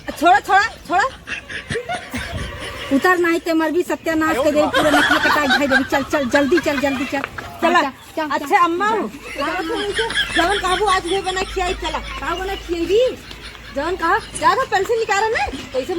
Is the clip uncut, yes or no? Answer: no